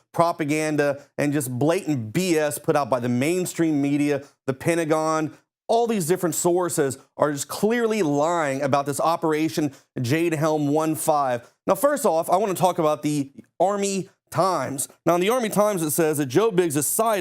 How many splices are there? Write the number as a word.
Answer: one